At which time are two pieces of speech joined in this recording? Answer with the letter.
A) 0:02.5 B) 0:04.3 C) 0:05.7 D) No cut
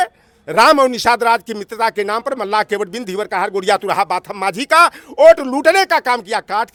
D